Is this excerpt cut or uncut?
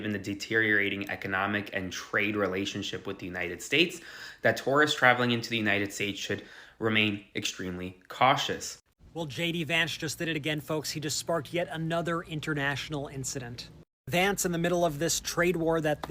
cut